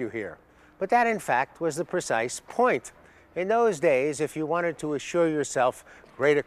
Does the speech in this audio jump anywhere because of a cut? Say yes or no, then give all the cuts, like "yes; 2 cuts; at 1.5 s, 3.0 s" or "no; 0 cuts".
yes; 1 cut; at 1.2 s